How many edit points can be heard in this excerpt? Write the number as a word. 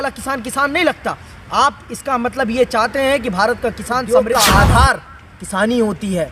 one